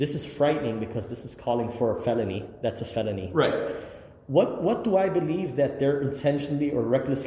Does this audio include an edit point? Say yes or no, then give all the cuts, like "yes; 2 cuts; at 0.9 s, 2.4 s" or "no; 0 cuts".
no; 0 cuts